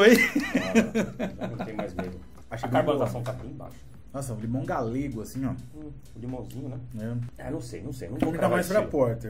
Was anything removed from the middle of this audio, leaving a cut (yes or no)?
yes